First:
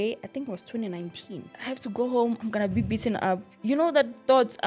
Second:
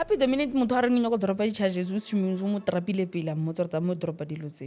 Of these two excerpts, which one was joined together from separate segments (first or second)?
first